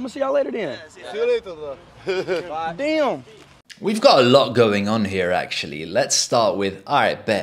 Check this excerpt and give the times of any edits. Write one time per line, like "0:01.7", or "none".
none